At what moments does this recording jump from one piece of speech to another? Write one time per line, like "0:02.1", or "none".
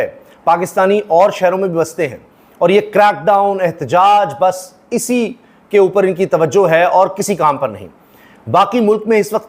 none